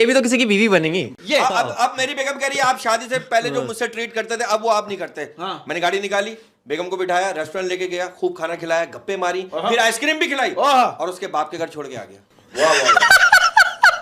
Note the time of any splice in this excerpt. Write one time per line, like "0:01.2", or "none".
0:01.1